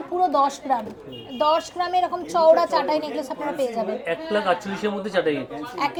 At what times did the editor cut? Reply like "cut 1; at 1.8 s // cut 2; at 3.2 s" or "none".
none